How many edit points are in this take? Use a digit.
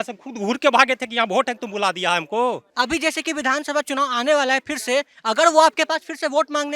1